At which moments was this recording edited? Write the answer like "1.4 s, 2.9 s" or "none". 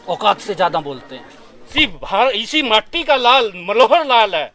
1.7 s